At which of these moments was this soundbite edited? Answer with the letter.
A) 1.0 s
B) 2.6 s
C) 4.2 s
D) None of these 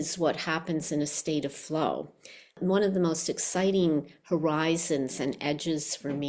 B